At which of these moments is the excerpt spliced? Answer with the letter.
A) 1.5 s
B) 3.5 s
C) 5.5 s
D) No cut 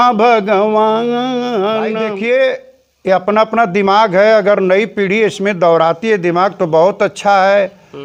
D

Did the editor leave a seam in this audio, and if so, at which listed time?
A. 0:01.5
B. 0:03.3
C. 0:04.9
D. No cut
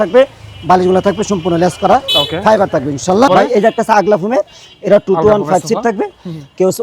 B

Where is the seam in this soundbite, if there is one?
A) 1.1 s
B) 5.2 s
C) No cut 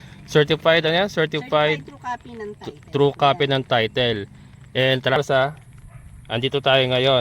B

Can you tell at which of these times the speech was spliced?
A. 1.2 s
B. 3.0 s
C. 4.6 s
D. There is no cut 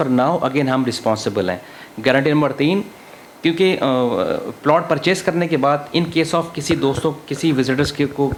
D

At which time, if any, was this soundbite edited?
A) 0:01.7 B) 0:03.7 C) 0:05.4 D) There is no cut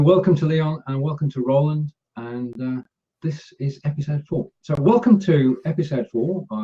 C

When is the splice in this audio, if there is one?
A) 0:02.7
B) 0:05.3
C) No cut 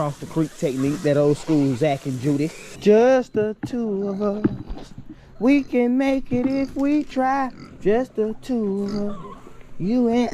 A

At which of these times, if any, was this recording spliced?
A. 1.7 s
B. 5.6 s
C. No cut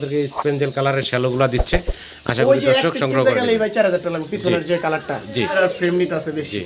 B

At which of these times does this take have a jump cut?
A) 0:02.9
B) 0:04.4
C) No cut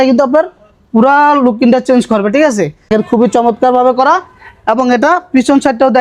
A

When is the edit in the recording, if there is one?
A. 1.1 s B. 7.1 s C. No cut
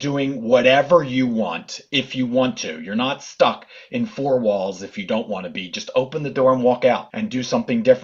B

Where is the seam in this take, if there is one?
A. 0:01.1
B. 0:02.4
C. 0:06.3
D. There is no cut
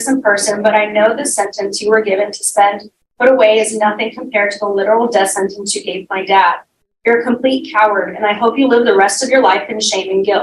B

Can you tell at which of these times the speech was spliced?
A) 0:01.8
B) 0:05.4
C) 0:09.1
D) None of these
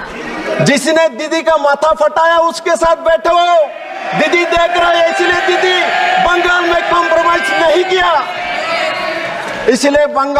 D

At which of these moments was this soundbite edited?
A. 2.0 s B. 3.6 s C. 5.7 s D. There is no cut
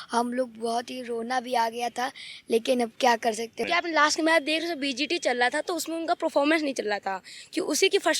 B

